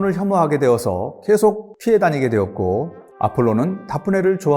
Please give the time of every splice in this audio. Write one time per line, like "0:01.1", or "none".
0:01.7
0:03.0